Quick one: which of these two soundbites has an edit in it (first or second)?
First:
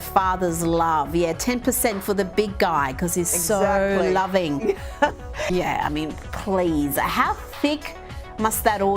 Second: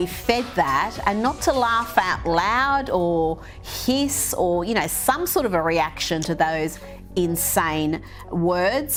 first